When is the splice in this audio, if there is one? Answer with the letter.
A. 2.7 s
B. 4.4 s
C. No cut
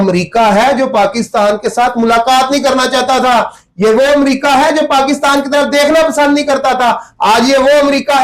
C